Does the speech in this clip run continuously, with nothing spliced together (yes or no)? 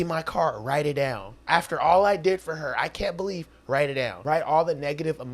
no